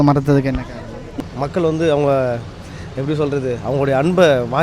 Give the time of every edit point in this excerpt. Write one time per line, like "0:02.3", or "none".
0:01.2

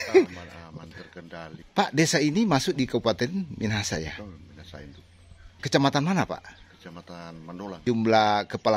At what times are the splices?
0:01.4
0:05.6
0:07.8

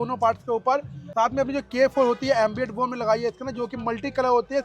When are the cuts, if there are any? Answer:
0:01.0

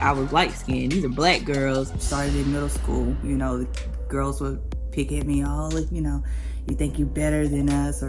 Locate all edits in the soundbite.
0:02.0

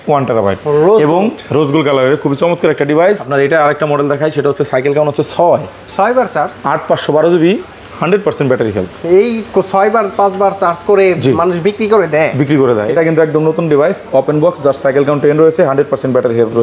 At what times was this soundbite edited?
0:03.3
0:12.8

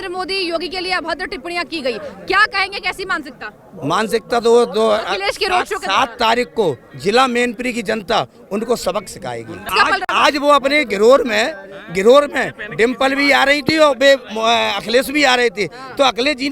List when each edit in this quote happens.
0:09.7

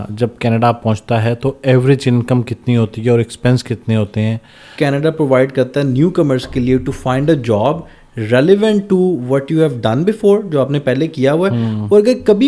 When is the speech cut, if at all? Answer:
0:04.7

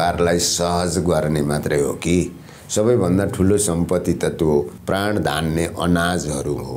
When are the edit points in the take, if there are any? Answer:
0:04.8

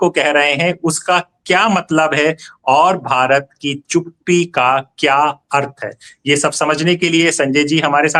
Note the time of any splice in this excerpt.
none

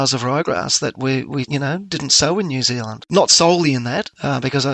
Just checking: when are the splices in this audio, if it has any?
0:03.0

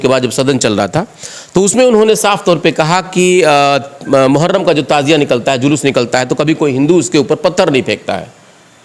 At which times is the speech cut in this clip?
none

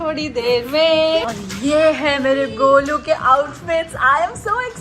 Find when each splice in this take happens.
0:01.3

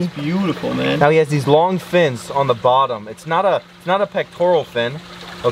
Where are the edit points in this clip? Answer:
none

